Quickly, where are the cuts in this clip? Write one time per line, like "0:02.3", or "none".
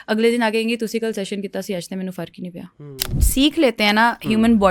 0:03.2